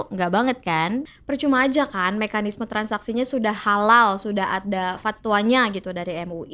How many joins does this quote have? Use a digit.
1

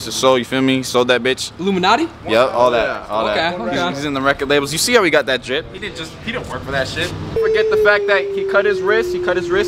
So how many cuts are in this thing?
1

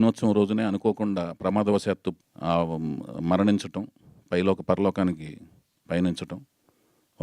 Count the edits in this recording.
1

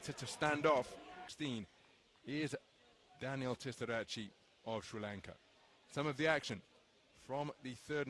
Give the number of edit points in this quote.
1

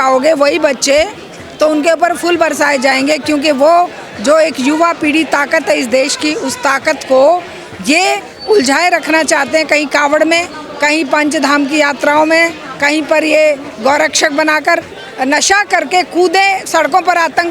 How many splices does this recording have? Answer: 1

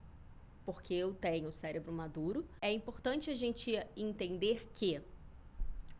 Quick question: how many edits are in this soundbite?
1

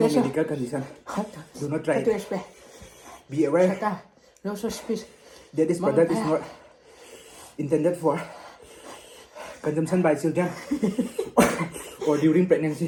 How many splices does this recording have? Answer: 0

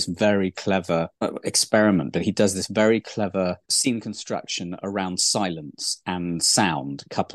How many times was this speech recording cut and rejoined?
0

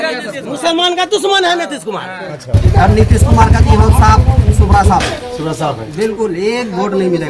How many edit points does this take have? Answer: 1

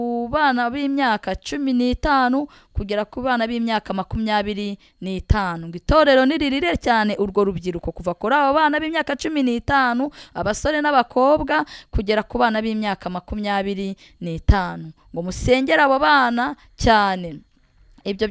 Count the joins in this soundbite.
0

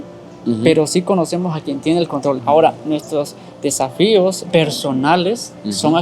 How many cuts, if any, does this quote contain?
2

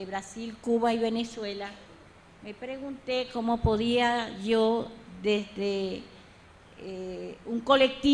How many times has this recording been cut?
1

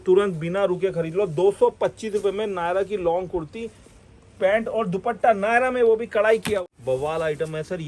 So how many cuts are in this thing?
1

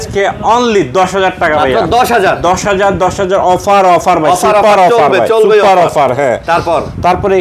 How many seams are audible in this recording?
0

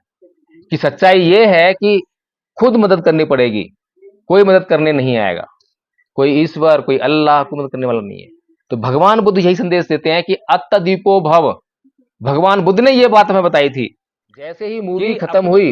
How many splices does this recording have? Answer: 1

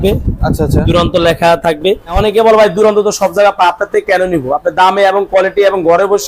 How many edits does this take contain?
1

